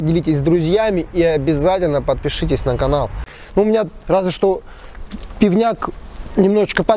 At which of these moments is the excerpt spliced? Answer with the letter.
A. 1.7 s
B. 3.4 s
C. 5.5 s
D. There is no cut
B